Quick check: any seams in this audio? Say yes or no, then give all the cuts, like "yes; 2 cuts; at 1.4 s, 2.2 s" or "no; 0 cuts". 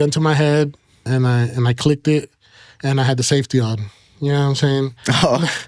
yes; 1 cut; at 1.1 s